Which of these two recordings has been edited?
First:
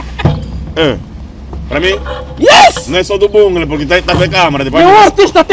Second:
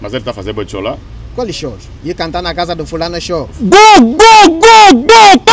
second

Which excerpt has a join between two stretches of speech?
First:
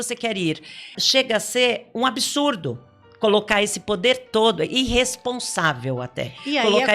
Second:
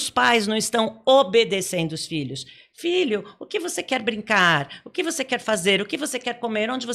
first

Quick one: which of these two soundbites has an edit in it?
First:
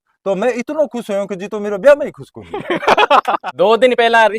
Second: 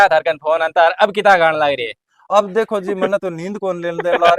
first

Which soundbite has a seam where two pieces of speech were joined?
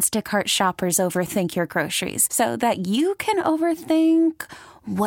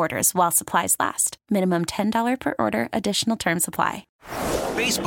second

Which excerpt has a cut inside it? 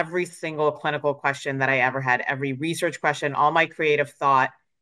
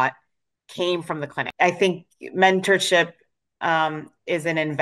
second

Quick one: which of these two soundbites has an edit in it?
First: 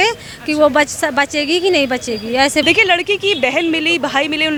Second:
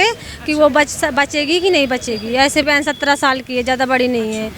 second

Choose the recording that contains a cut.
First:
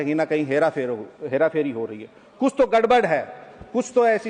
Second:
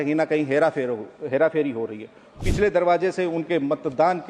second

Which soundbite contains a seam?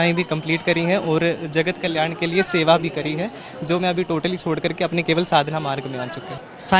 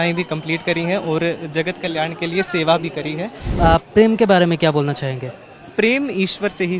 second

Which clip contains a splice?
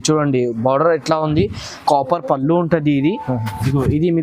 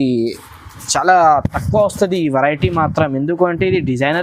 first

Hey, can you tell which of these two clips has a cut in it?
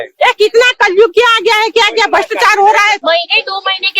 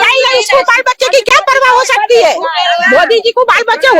first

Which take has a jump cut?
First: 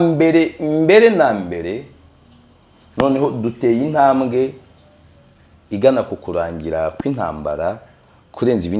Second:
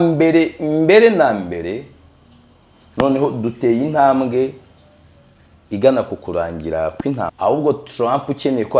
second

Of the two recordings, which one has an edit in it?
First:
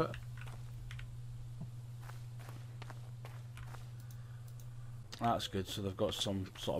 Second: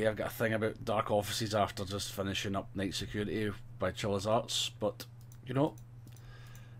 first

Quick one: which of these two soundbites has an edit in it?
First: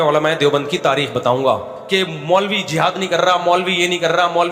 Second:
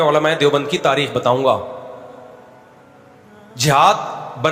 first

